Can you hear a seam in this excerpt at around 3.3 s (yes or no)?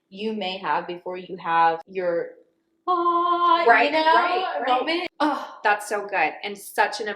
no